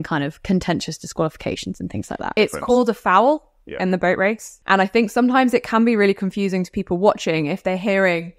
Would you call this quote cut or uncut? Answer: cut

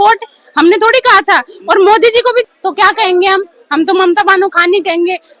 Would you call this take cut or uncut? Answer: cut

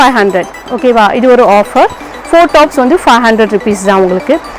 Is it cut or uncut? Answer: uncut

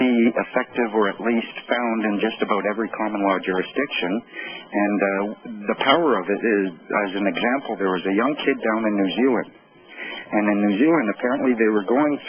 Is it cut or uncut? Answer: cut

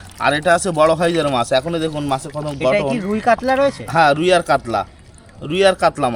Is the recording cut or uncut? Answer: uncut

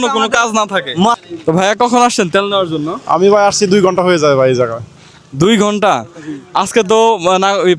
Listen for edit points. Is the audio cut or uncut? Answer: cut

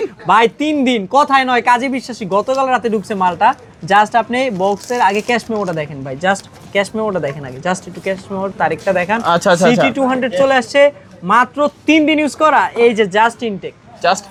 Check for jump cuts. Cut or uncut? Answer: uncut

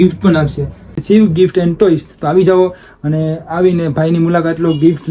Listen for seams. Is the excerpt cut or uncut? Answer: cut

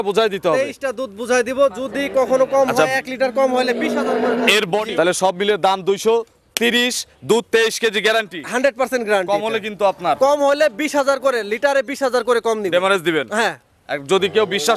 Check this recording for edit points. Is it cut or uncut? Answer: cut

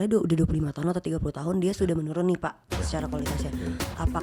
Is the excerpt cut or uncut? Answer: uncut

